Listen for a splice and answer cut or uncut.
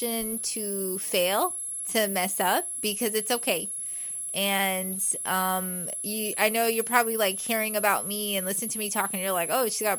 uncut